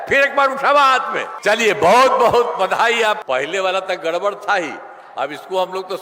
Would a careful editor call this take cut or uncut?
cut